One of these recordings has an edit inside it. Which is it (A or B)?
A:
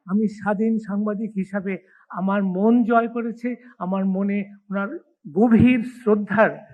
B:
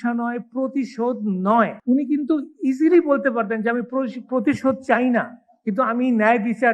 B